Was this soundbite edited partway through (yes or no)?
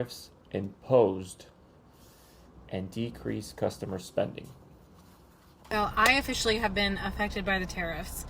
yes